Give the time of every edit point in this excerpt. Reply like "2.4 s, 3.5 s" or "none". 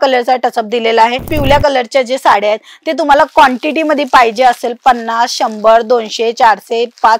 1.3 s